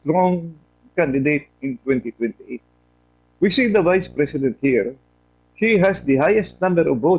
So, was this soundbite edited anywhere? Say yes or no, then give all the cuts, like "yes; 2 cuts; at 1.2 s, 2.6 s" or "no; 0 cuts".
no; 0 cuts